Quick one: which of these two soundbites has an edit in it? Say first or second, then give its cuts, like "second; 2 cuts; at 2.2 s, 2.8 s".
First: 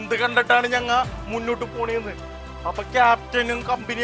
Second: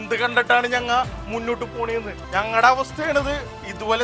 second; 1 cut; at 2.2 s